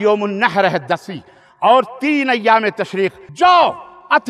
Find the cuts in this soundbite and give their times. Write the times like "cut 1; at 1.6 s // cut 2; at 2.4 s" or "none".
cut 1; at 3.2 s